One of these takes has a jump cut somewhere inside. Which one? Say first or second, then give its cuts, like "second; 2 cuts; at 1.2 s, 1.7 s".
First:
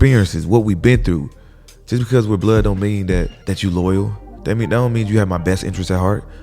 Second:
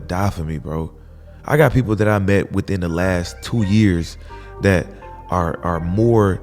first; 1 cut; at 3.4 s